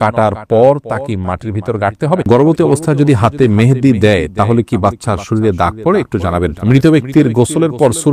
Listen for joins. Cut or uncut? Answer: cut